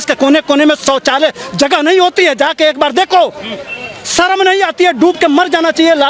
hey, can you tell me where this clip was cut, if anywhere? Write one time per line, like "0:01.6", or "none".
none